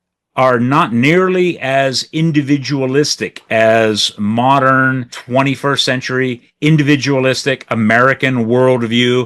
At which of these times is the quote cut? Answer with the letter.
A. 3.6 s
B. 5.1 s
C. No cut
B